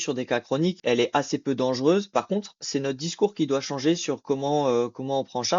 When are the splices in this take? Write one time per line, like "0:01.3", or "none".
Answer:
0:00.8
0:02.1